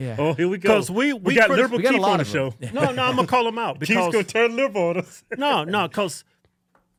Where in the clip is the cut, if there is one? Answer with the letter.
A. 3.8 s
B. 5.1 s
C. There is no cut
C